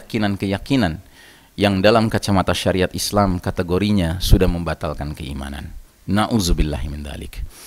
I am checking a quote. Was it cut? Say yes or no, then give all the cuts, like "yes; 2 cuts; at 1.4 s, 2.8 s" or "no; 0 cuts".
no; 0 cuts